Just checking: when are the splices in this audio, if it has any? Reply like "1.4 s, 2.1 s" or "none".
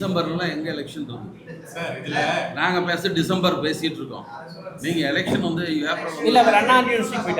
none